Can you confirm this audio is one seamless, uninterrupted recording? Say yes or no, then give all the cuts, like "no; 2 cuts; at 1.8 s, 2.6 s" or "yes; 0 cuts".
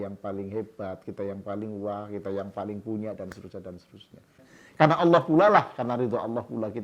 no; 1 cut; at 4.5 s